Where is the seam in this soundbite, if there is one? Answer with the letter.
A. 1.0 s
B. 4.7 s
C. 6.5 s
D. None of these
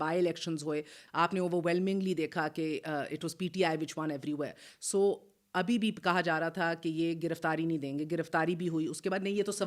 A